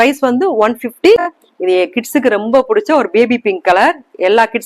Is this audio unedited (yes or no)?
no